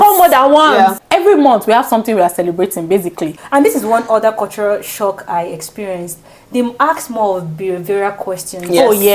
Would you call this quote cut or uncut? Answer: cut